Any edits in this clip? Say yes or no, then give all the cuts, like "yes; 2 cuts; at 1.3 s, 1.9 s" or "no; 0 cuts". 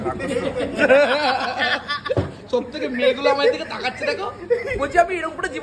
no; 0 cuts